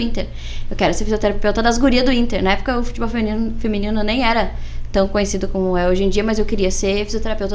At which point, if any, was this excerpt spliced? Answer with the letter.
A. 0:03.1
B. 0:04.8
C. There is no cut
C